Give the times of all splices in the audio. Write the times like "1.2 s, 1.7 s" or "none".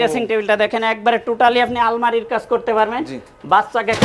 none

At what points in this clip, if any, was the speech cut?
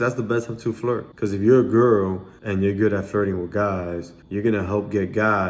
1.1 s

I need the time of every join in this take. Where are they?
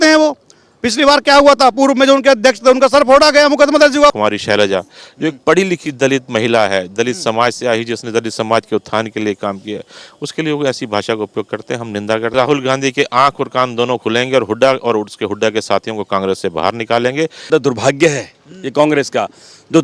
4.2 s, 12.3 s, 17.5 s

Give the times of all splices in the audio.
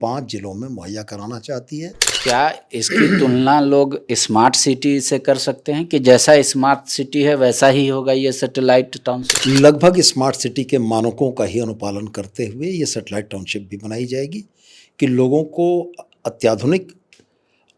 2.2 s

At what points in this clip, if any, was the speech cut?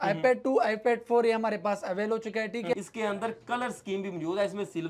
2.7 s

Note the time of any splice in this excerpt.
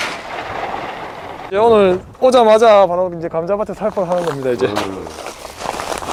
none

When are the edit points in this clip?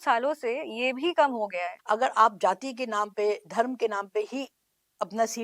1.7 s

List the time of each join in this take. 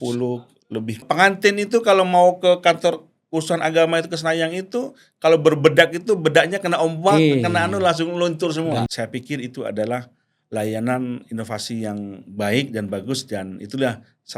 1.0 s, 8.8 s

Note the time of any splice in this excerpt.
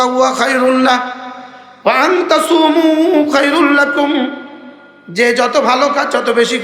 none

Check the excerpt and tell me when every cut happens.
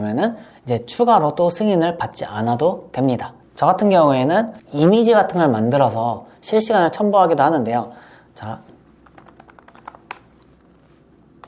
3.3 s

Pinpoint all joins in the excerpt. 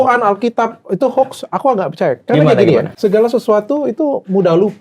3.0 s

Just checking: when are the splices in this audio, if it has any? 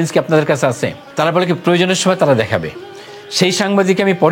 1.0 s

